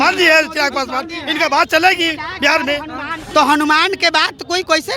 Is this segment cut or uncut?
cut